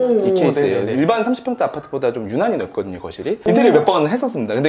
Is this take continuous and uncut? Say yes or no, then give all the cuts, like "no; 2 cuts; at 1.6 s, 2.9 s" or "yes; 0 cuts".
no; 1 cut; at 3.4 s